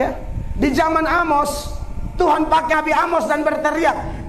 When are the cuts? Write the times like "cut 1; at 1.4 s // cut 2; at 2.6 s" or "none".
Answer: cut 1; at 2.7 s